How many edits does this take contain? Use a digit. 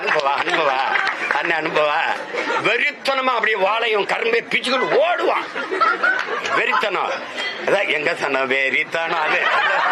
0